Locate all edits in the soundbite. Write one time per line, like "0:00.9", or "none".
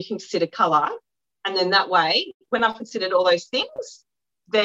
none